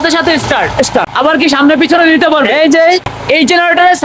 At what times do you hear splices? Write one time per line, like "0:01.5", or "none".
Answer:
0:01.1
0:03.1